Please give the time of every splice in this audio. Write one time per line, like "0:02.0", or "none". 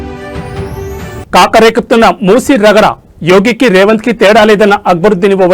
0:01.2